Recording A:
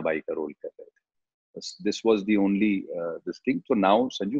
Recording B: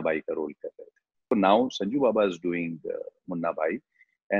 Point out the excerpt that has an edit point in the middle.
B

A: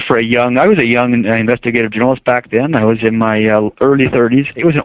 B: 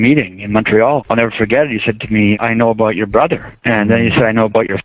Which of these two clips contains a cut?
B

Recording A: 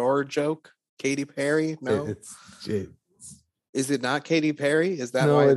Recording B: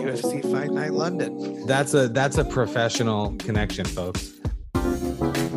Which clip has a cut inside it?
B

